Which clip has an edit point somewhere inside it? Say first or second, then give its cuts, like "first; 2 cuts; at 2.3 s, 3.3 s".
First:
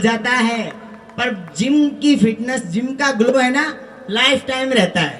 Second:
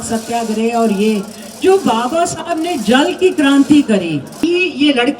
second; 1 cut; at 4.2 s